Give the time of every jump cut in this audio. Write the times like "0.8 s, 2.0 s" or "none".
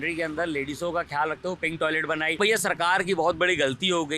2.4 s

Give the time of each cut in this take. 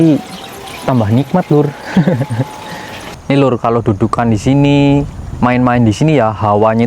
3.0 s

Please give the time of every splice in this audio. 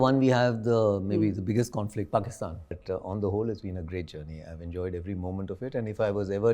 2.8 s

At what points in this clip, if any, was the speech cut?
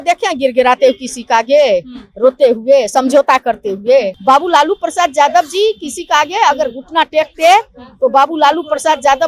4.1 s

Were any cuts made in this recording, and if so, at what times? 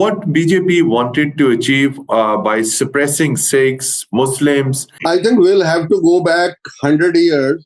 4.9 s

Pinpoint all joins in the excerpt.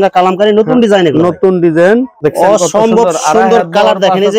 2.1 s

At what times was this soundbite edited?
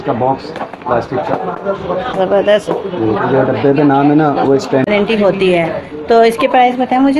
4.9 s

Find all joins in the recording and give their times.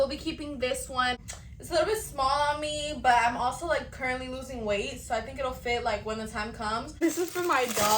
1.2 s, 7.0 s

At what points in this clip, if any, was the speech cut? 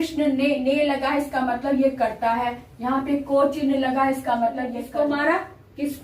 4.8 s

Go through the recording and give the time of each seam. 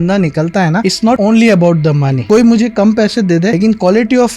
1.1 s, 2.1 s, 3.5 s

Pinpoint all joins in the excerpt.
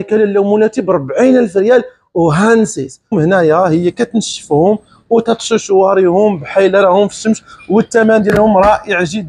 3.1 s

